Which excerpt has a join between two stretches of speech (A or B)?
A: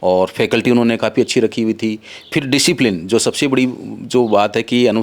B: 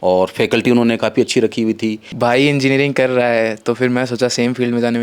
B